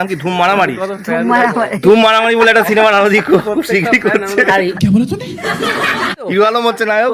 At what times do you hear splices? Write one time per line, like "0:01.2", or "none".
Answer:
0:04.7
0:06.3